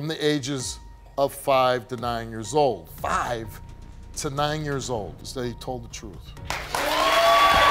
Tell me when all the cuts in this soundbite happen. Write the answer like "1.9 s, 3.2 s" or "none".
5.1 s